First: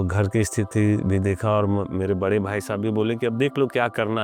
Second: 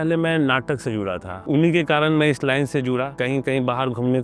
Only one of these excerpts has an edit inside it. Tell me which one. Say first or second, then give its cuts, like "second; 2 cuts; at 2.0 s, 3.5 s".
second; 2 cuts; at 1.3 s, 3.2 s